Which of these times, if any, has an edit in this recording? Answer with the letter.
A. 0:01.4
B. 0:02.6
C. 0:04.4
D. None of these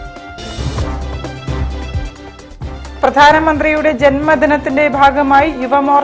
B